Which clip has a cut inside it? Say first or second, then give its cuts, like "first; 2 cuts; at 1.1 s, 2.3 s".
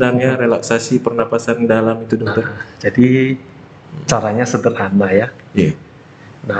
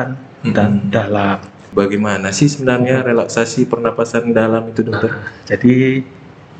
second; 1 cut; at 1.6 s